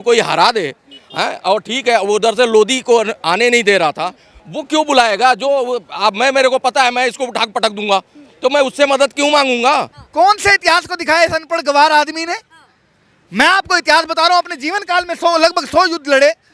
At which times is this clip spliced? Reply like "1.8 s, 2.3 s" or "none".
10.0 s